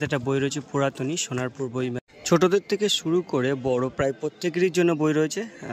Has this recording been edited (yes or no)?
yes